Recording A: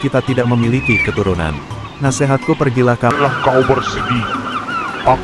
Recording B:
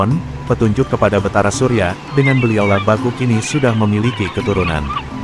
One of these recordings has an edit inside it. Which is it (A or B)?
A